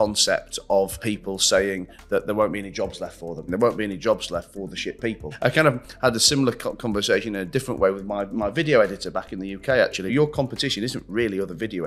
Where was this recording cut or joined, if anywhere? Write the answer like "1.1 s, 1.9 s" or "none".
1.0 s, 3.4 s, 5.3 s, 10.1 s